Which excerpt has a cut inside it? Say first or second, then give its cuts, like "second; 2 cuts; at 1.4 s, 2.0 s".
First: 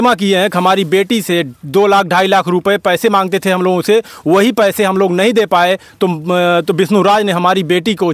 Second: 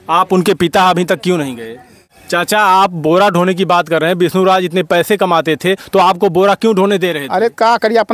second; 1 cut; at 2.0 s